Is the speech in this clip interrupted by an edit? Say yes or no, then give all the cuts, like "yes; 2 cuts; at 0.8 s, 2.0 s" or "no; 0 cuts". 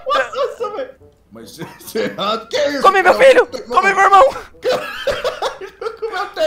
yes; 1 cut; at 0.9 s